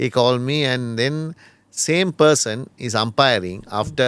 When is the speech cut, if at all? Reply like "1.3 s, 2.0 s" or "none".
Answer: none